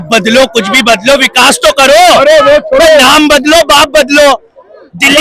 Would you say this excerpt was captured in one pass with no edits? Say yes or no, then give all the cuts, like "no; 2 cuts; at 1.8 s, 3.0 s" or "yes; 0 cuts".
yes; 0 cuts